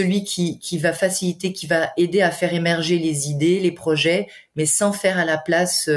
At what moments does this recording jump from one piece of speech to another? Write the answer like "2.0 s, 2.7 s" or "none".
none